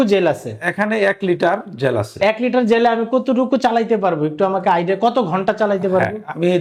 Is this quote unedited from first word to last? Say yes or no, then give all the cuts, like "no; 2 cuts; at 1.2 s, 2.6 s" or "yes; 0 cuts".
yes; 0 cuts